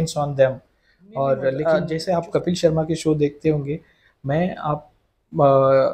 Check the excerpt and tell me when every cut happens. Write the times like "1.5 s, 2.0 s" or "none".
1.6 s